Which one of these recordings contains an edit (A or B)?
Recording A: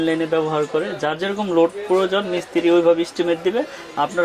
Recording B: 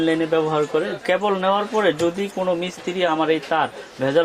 B